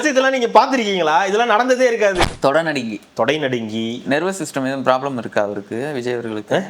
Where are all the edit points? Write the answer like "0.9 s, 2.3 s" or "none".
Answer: 2.2 s